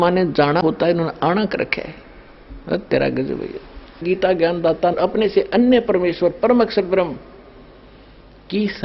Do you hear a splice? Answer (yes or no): yes